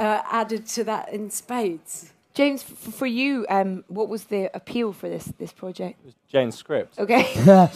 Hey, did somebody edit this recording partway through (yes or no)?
yes